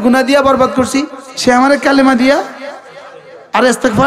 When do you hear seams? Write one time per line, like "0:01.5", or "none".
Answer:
0:01.2